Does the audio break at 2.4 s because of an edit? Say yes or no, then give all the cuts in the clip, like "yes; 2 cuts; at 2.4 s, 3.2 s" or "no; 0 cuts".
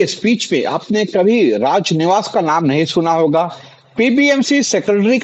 no; 0 cuts